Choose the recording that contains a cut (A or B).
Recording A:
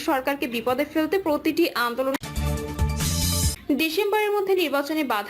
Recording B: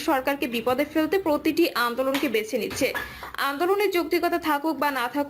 A